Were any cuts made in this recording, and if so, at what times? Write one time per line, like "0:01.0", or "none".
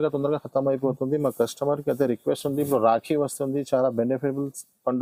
none

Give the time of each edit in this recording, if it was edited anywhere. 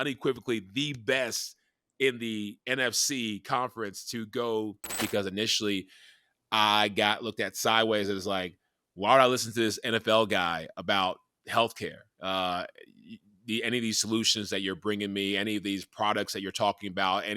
0:05.0

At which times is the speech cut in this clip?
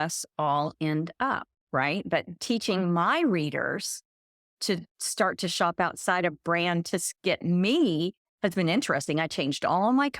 0:02.4
0:04.5

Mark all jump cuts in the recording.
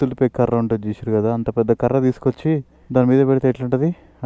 0:02.7

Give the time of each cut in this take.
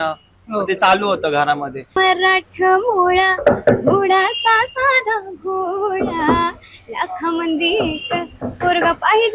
0:01.9

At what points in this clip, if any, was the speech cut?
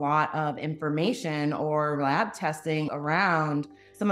none

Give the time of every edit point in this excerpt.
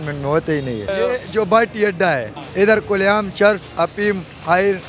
0:00.9
0:02.4

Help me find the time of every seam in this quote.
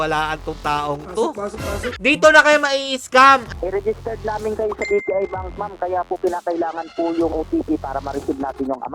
0:01.9
0:03.5
0:07.3

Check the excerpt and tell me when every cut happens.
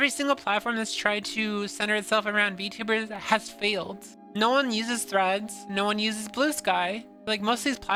none

